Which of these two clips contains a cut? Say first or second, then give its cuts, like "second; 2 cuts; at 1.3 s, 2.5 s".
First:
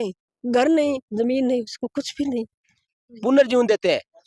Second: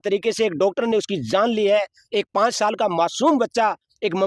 first; 1 cut; at 3.0 s